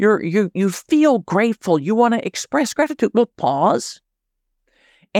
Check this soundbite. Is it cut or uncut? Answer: cut